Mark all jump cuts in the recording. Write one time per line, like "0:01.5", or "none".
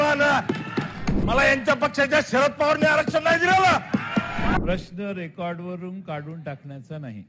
0:01.1
0:04.5